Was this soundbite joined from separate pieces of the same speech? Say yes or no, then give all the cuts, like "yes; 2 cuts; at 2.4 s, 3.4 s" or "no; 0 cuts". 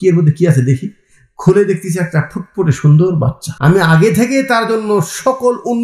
yes; 1 cut; at 3.4 s